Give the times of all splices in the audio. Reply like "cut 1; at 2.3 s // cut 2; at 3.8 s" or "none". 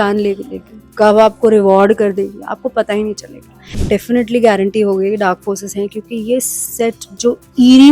cut 1; at 3.8 s